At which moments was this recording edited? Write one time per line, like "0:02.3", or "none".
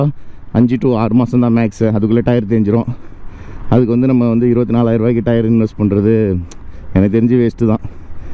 none